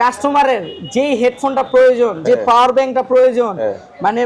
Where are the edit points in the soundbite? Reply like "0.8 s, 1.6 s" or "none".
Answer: none